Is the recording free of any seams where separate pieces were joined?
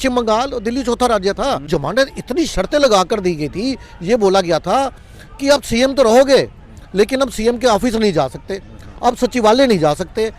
no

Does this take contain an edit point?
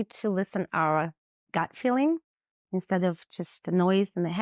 no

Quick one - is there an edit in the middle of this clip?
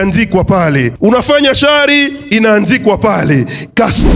yes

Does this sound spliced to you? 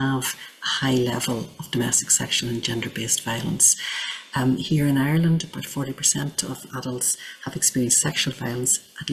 no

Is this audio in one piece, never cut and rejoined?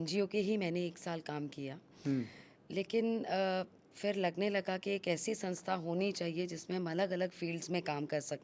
yes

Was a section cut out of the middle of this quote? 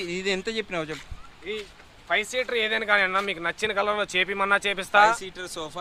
no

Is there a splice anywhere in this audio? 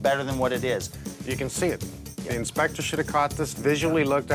yes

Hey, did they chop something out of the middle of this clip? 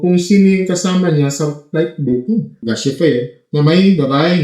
yes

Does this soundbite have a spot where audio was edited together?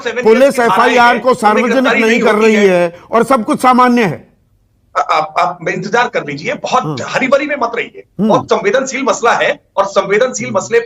no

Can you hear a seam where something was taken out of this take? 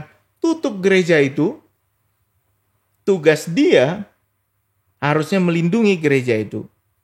no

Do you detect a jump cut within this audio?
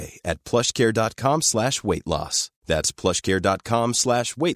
no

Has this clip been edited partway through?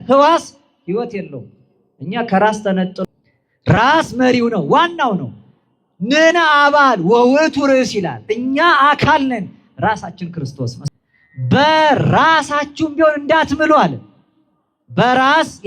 yes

